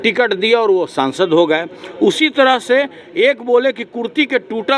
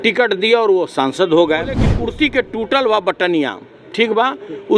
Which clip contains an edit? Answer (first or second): second